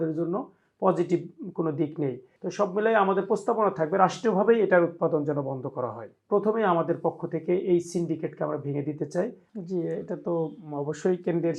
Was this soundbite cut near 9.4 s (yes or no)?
yes